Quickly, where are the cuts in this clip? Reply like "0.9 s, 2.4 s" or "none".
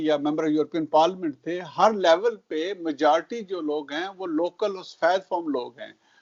none